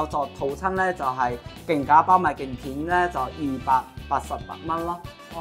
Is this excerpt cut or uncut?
uncut